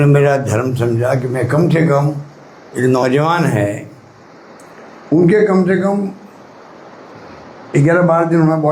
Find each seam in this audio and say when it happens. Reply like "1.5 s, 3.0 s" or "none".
none